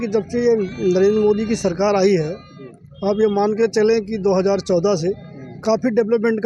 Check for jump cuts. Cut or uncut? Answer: uncut